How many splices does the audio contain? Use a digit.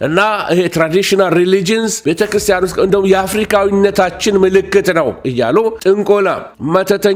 0